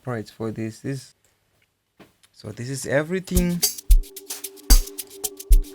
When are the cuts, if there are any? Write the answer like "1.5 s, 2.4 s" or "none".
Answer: 1.1 s